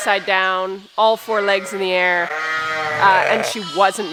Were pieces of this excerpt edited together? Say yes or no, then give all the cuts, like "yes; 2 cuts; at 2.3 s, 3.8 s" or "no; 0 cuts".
no; 0 cuts